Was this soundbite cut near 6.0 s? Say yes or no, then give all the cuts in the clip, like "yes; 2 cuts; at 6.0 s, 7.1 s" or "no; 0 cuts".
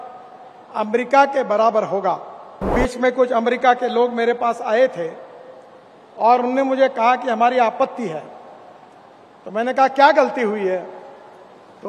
no; 1 cut; at 2.7 s